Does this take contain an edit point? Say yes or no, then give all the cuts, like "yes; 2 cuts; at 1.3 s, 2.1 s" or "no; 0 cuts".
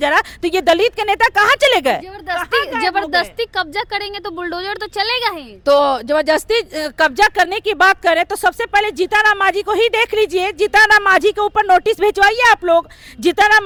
no; 0 cuts